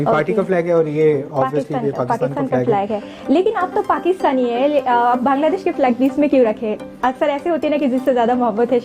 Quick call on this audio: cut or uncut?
uncut